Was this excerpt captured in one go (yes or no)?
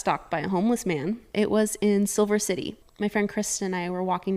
no